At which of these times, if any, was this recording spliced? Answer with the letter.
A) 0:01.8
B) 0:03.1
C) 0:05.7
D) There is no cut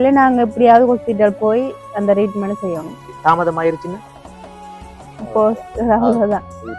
B